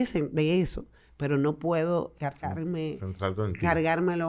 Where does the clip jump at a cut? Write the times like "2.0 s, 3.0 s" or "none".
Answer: 2.2 s